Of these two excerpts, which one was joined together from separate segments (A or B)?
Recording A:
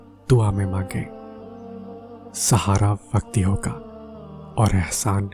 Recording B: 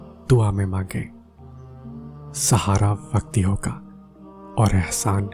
A